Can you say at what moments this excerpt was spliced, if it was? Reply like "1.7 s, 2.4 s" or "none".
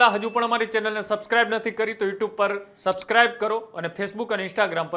none

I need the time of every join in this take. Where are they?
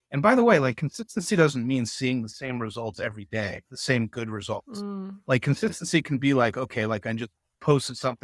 none

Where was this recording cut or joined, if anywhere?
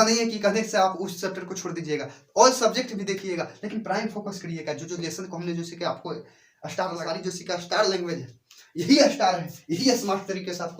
7.0 s

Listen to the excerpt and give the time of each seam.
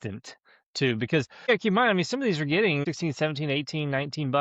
1.5 s, 2.8 s

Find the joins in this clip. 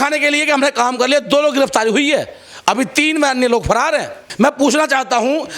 4.2 s

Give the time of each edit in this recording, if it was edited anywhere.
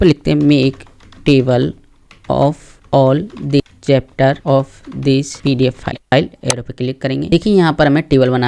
6.1 s, 7.3 s

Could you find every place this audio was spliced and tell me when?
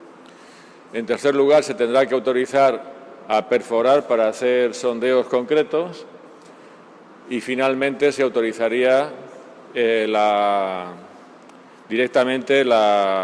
4.5 s

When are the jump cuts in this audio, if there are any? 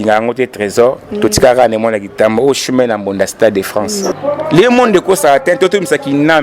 4.2 s

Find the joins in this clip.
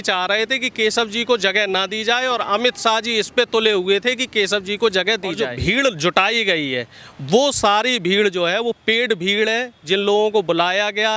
5.6 s

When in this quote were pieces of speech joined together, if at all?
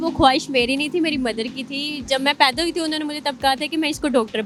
none

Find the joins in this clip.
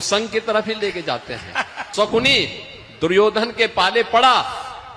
1.8 s

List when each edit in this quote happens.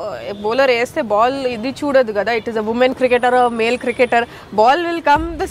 none

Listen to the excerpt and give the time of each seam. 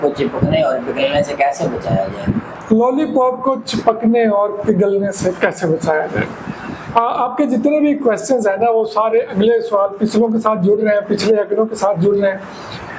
none

